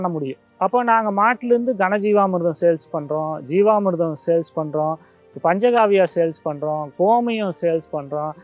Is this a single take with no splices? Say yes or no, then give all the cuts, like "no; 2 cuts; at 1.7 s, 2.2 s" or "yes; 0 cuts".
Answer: yes; 0 cuts